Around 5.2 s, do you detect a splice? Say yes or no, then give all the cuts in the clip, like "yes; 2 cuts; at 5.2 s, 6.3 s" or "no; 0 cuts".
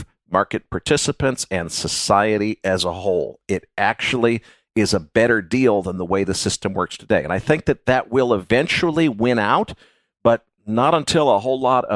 no; 1 cut; at 8.4 s